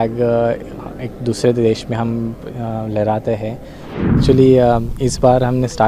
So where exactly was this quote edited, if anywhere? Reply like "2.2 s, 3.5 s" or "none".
4.2 s